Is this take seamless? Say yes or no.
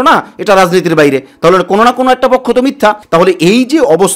yes